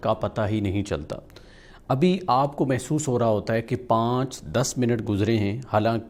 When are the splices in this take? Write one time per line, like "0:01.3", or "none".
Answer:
none